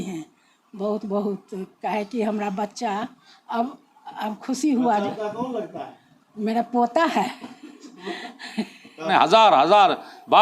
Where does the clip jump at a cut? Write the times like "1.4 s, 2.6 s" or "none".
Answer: 8.9 s